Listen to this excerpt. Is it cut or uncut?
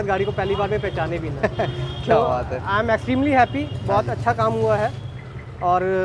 uncut